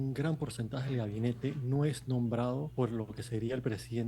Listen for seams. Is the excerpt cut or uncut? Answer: cut